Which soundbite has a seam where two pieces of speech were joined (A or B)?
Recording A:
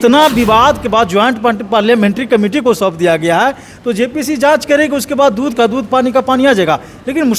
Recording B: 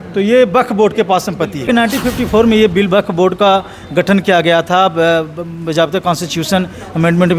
B